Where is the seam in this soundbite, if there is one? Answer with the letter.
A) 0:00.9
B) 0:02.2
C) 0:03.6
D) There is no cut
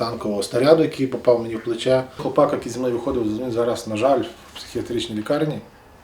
B